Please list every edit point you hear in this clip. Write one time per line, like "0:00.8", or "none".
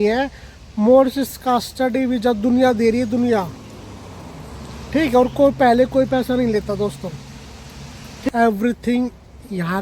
0:08.3